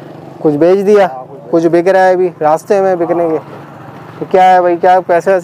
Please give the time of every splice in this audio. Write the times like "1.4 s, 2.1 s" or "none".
none